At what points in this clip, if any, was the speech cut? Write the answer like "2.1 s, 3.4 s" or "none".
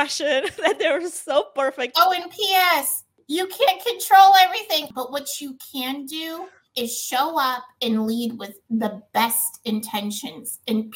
1.9 s, 4.9 s